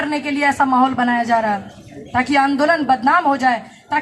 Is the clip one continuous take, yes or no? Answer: yes